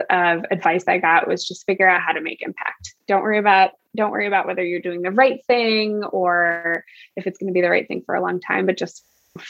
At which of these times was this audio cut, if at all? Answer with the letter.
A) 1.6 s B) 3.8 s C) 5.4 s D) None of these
D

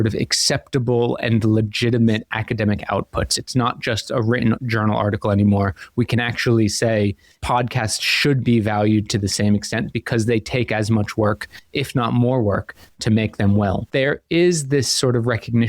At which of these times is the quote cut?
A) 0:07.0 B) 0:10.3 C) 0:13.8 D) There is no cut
C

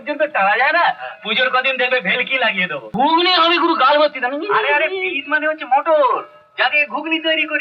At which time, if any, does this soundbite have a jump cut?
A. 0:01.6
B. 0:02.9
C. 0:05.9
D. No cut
B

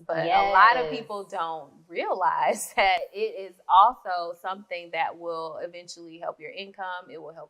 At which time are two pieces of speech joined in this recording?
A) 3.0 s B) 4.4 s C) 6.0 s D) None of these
A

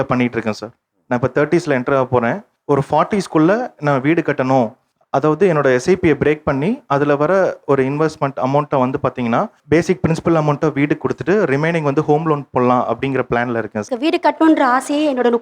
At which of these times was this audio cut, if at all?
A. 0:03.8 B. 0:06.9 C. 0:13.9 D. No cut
C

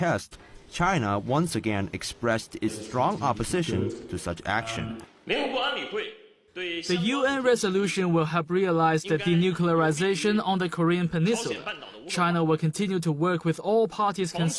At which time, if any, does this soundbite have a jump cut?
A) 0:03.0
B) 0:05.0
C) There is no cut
B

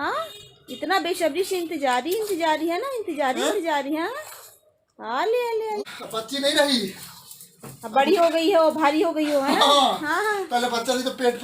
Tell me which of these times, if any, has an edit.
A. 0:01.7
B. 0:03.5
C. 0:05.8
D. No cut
C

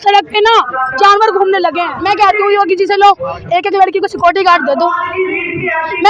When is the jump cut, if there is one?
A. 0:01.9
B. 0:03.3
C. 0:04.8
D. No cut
A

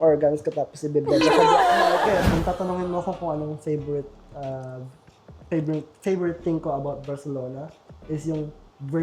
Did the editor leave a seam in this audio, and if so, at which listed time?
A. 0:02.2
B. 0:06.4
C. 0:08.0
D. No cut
A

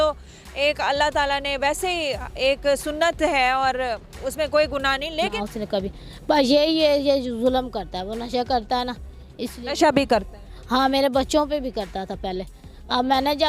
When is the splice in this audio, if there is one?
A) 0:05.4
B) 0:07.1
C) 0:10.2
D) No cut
A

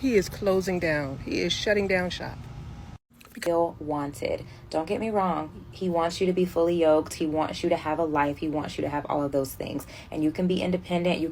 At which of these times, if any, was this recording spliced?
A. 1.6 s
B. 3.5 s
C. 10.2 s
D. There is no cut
B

